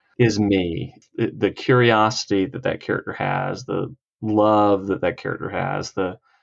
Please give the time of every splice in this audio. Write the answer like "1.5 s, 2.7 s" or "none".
1.0 s